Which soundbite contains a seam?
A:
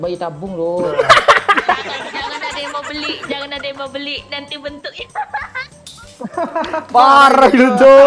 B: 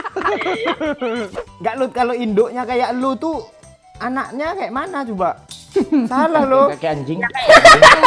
B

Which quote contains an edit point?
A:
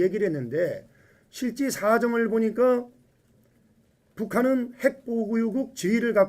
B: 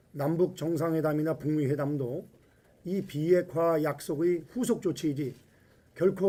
A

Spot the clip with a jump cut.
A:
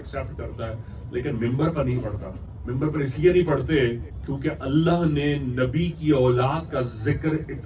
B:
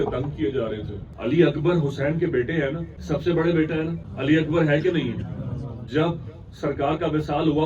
B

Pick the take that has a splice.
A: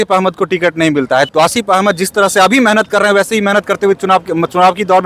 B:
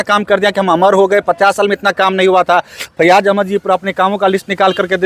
A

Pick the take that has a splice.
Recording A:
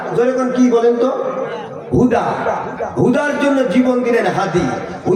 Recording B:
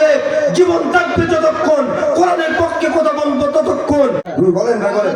B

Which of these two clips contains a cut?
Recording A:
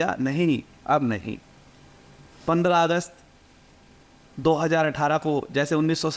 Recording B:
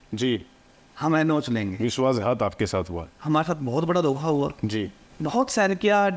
B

